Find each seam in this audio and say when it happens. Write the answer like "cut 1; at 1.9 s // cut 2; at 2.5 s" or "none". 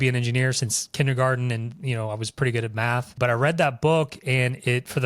cut 1; at 3.1 s